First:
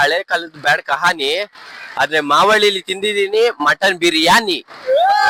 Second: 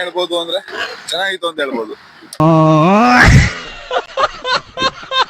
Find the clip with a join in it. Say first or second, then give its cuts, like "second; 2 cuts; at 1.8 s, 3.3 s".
second; 1 cut; at 2.4 s